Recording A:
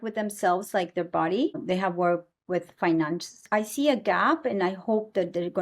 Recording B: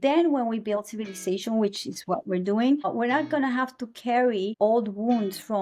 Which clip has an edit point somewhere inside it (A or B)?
A